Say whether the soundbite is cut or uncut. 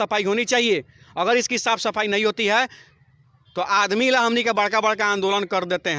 uncut